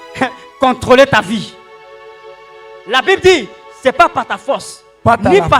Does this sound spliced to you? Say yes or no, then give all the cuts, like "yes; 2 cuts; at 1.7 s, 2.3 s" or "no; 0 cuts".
no; 0 cuts